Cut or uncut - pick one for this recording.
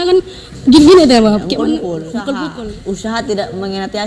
cut